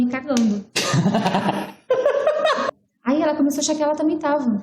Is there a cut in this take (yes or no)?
yes